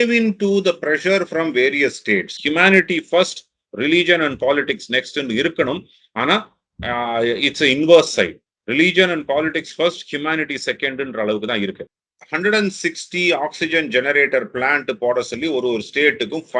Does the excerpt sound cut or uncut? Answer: cut